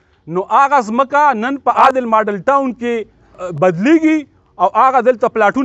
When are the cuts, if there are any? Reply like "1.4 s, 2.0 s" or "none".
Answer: 1.8 s, 3.4 s